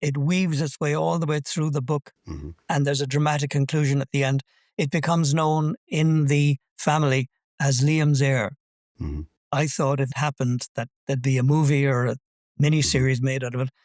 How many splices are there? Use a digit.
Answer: 2